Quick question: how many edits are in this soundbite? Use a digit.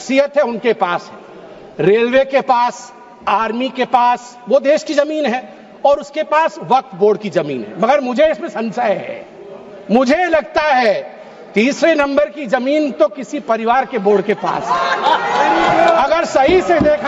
0